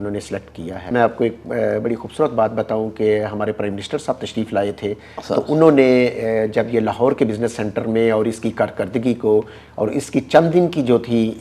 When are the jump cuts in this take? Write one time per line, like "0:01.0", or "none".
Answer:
0:00.9